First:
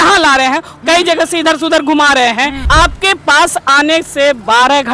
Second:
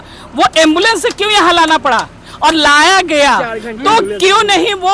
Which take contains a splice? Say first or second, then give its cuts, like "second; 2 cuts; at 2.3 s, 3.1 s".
first; 1 cut; at 2.6 s